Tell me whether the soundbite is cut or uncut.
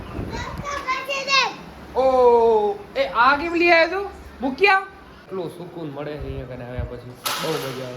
cut